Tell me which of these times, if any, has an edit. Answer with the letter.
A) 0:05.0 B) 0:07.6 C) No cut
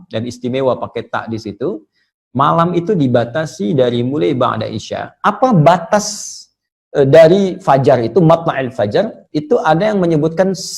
A